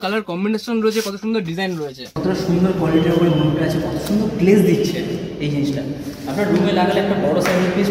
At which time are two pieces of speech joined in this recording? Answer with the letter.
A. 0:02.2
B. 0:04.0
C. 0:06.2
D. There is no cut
A